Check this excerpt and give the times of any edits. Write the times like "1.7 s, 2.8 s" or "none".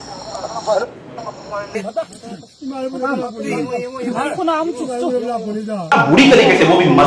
1.8 s, 5.8 s

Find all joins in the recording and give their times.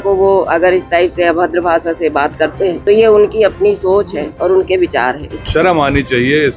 2.8 s, 5.3 s

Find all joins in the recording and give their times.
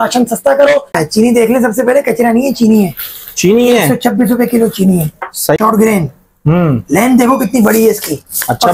1.0 s, 5.6 s

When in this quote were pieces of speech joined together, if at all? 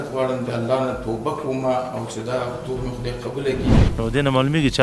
3.9 s

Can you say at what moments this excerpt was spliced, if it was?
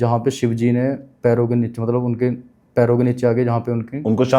none

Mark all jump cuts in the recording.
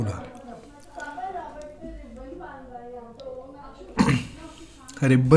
none

